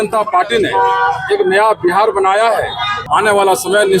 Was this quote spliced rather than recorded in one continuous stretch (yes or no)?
yes